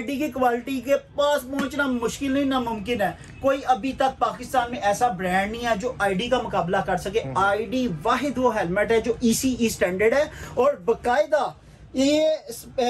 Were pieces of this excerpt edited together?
no; 0 cuts

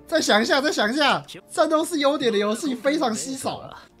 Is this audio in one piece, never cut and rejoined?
yes; 0 cuts

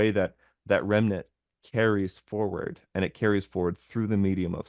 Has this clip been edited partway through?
no; 0 cuts

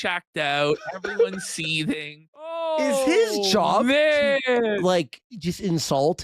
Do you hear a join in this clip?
yes; 1 cut; at 2.6 s

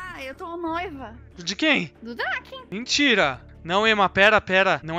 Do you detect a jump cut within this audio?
yes; 1 cut; at 3.5 s

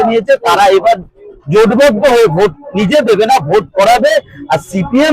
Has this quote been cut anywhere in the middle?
no; 0 cuts

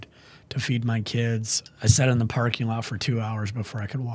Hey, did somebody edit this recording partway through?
yes; 1 cut; at 1.6 s

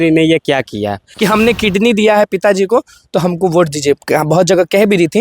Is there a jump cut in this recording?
yes; 1 cut; at 1.0 s

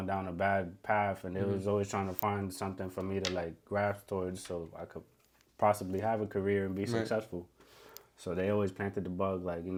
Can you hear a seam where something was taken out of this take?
no; 0 cuts

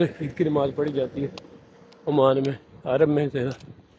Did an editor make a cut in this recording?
no; 0 cuts

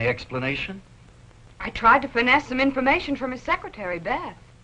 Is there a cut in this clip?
no; 0 cuts

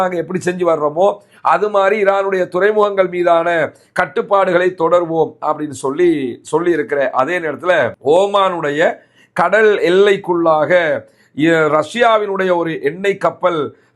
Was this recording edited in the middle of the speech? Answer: no; 0 cuts

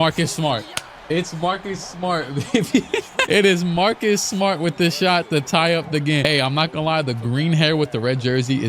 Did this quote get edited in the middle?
no; 0 cuts

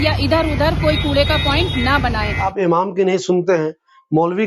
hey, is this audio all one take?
no; 1 cut; at 2.4 s

